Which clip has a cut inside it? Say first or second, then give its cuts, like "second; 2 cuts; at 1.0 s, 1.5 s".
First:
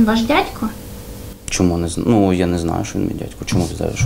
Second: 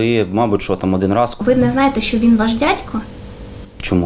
second; 1 cut; at 1.4 s